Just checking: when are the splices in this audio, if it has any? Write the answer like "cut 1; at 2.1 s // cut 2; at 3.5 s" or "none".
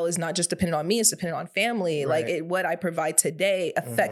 none